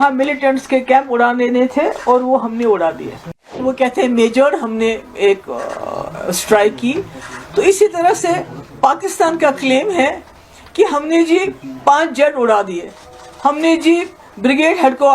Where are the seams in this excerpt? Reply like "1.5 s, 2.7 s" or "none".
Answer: 3.5 s